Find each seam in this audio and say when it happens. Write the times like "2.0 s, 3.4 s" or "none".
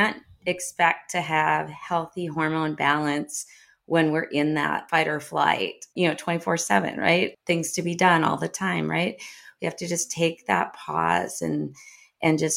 4.8 s, 5.9 s, 7.3 s